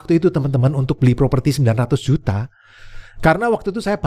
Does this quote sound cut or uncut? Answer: uncut